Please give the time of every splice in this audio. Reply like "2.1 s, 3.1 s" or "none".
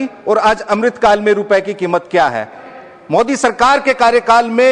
2.7 s